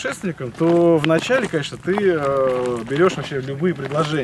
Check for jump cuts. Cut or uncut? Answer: uncut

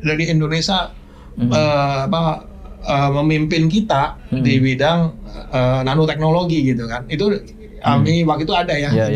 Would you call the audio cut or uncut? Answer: uncut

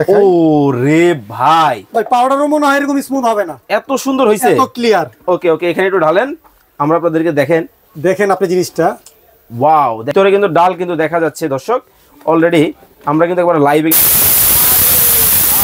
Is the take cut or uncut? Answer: cut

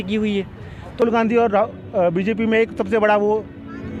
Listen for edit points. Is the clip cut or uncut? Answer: cut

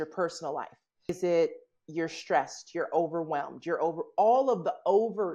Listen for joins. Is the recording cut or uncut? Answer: cut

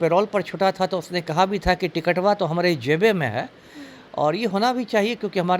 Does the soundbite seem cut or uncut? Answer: uncut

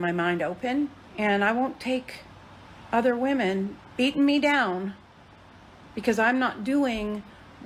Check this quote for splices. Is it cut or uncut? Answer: cut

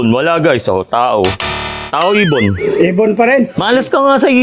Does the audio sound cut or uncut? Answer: cut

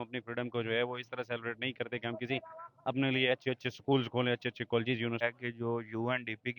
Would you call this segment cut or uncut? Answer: cut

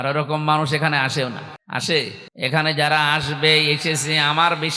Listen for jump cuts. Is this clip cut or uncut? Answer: cut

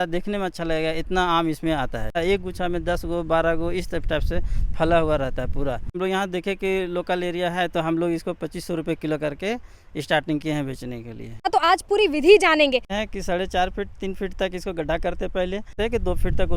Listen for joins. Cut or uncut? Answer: cut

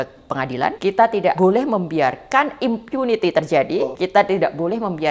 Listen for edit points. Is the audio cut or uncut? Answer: cut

